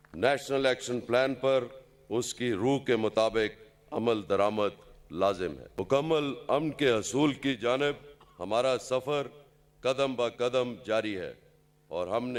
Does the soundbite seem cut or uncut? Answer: uncut